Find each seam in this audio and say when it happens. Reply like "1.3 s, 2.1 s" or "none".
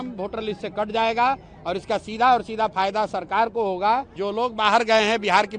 4.2 s